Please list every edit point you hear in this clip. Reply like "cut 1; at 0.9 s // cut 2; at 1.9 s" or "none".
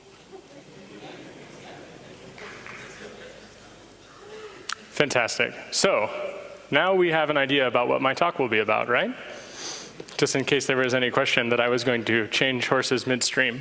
cut 1; at 1.1 s